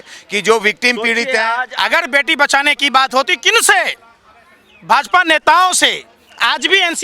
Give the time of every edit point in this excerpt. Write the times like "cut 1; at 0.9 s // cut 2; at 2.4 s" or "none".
cut 1; at 1.6 s